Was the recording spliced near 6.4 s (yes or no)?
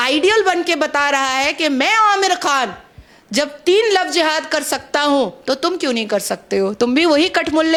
no